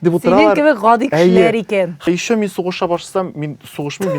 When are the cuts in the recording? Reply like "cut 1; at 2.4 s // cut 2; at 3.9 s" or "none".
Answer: cut 1; at 2.0 s